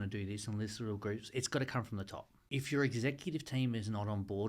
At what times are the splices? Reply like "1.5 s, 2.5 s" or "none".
2.4 s